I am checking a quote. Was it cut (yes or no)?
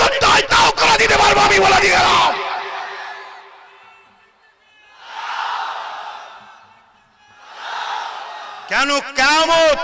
no